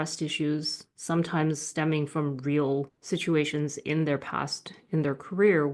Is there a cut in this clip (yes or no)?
yes